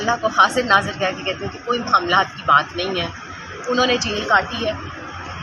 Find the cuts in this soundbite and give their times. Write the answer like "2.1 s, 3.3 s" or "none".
none